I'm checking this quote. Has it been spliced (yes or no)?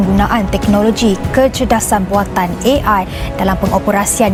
no